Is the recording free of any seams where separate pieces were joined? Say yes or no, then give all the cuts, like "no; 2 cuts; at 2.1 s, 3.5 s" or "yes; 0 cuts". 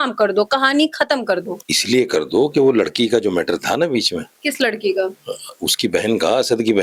yes; 0 cuts